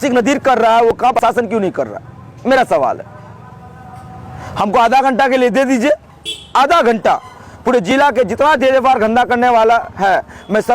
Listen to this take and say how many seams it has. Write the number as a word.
one